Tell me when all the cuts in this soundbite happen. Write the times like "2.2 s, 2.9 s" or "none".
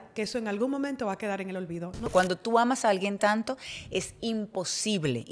2.1 s